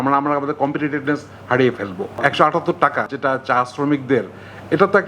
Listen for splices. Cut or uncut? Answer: cut